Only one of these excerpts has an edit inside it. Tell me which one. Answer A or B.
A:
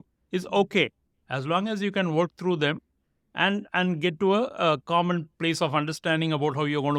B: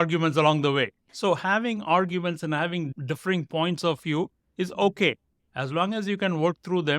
B